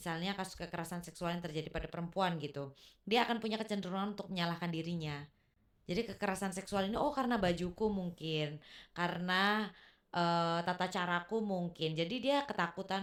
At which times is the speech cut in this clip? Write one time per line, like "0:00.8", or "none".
none